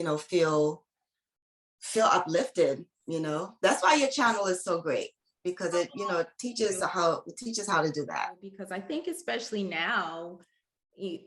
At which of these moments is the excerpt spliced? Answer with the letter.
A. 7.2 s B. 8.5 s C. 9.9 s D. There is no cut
B